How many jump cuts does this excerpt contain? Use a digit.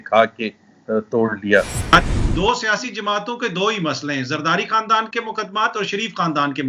1